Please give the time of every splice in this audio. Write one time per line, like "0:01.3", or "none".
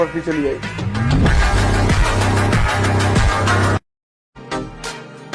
0:03.9